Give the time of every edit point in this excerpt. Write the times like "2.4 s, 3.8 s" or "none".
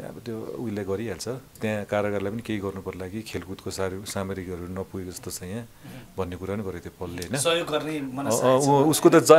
1.6 s